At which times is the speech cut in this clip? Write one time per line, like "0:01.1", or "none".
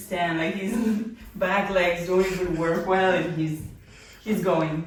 none